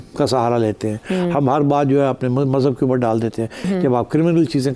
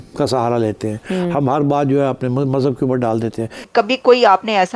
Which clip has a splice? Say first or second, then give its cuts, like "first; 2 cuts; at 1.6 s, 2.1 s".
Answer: second; 1 cut; at 3.6 s